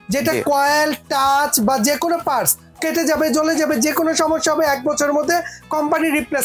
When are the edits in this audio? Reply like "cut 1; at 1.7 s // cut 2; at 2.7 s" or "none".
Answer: none